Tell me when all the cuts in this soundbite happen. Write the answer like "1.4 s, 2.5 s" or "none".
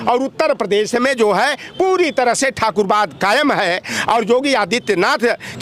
none